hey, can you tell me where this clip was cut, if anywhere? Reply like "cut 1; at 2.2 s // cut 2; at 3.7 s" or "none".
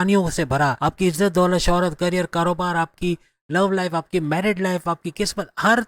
none